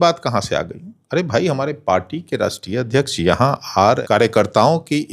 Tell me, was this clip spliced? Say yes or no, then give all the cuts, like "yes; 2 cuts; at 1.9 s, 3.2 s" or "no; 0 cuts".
yes; 1 cut; at 4.0 s